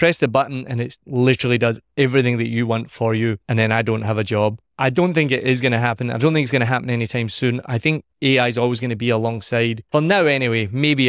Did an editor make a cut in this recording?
yes; 3 cuts; at 3.4 s, 4.7 s, 9.8 s

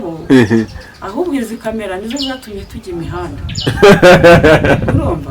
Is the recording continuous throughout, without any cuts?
yes; 0 cuts

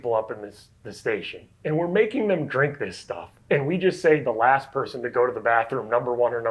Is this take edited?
no; 0 cuts

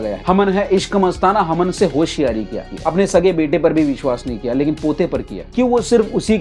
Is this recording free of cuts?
no; 1 cut; at 2.5 s

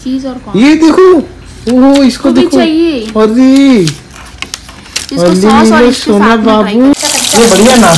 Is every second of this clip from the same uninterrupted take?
no; 1 cut; at 6.9 s

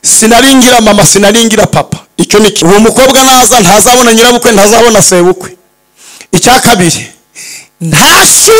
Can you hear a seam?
yes; 1 cut; at 2.6 s

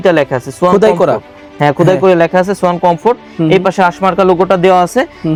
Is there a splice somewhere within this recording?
no; 0 cuts

